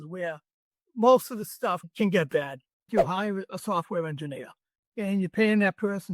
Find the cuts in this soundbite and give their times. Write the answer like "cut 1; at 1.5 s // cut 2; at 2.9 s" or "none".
cut 1; at 2.9 s